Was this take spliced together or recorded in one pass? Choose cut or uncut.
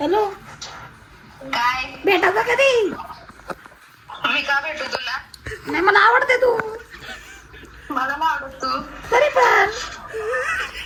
uncut